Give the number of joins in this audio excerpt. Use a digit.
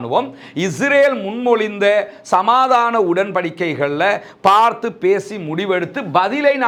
0